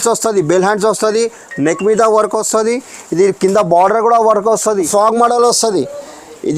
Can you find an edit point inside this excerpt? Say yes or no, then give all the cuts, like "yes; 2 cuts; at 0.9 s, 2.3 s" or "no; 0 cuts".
yes; 1 cut; at 4.9 s